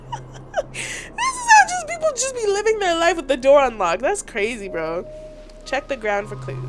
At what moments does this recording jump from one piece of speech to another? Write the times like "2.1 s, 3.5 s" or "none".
none